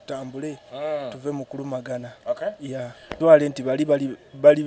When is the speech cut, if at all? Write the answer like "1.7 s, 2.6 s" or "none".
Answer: 3.2 s